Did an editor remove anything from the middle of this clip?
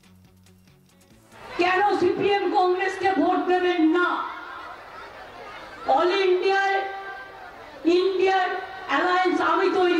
yes; 1 cut; at 1.7 s

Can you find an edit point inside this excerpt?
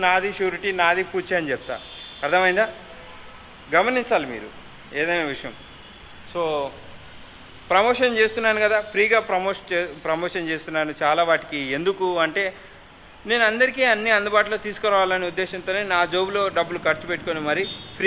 no; 0 cuts

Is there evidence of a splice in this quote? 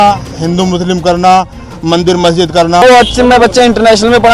yes; 1 cut; at 2.8 s

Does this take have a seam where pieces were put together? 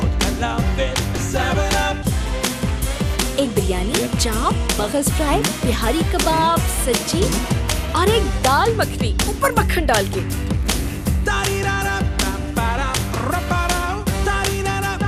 no; 0 cuts

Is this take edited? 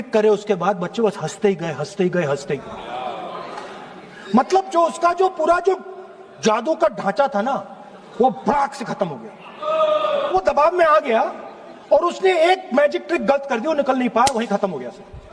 yes; 1 cut; at 10.3 s

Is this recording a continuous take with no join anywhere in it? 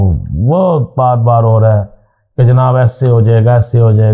yes; 0 cuts

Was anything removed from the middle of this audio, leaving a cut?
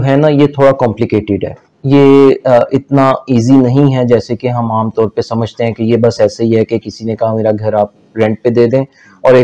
no; 0 cuts

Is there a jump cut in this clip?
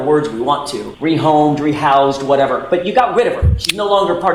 no; 0 cuts

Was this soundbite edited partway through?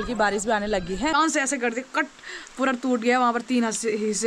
yes; 1 cut; at 1.1 s

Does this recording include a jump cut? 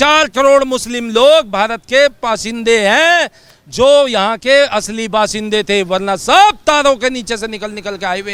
no; 0 cuts

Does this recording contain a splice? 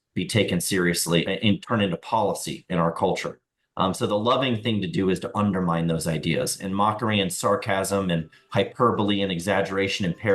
yes; 1 cut; at 1.3 s

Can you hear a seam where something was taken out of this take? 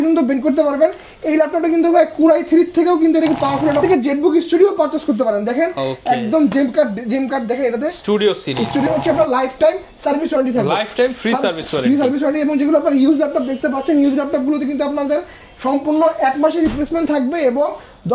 yes; 2 cuts; at 3.8 s, 8.9 s

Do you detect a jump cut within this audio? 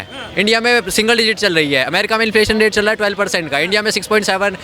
no; 0 cuts

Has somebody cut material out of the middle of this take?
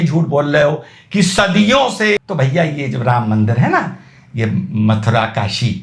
yes; 1 cut; at 2.2 s

